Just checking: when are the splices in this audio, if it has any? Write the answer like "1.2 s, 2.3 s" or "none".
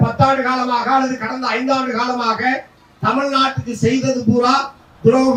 none